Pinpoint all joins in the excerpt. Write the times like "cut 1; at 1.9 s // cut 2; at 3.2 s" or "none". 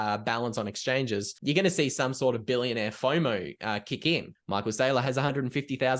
cut 1; at 1.3 s // cut 2; at 4.3 s